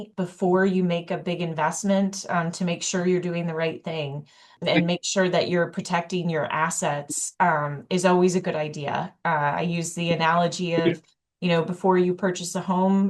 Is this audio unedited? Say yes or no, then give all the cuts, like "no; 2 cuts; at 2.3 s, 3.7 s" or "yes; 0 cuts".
yes; 0 cuts